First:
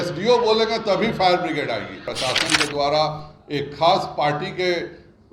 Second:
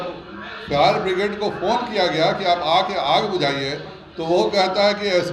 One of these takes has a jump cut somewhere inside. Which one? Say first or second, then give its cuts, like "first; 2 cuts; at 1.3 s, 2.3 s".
first; 1 cut; at 2.1 s